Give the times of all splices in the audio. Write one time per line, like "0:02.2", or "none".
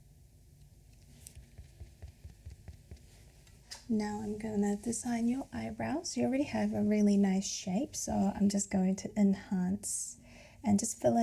0:01.3
0:03.7